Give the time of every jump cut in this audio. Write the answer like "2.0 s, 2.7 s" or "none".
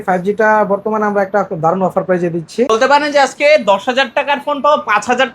2.7 s

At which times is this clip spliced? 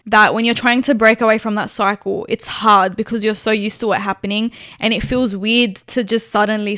none

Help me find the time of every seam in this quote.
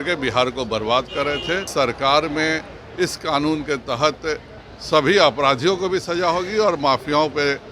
1.7 s

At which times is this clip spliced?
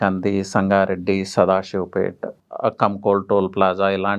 2.3 s

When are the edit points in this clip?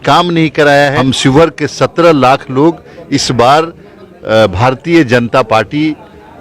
1.0 s

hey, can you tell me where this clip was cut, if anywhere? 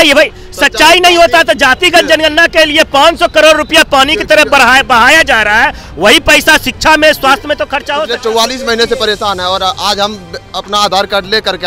7.9 s

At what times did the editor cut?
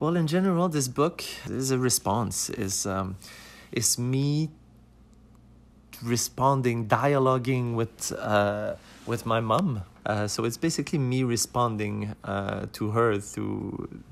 1.3 s, 9.9 s

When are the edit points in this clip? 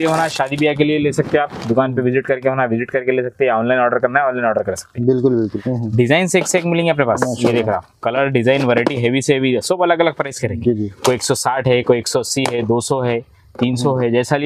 5.4 s

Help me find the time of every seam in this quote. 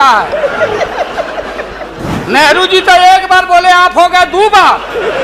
2.1 s

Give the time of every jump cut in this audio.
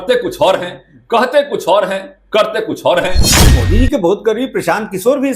3.3 s

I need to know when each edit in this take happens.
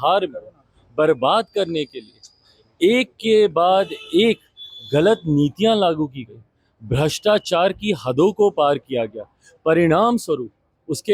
none

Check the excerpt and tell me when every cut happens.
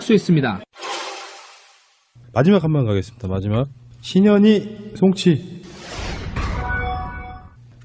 3.6 s

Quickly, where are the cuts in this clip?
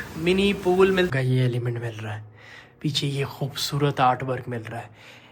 1.1 s

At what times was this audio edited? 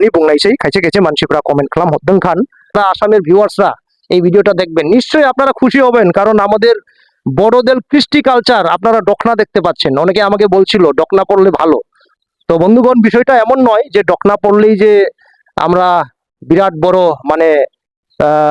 2.8 s

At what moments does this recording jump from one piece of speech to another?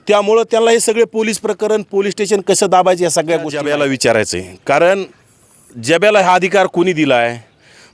3.6 s

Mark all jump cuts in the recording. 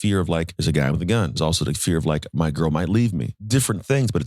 1.3 s, 3.3 s

